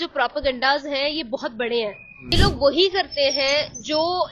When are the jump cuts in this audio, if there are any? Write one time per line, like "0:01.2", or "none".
0:02.3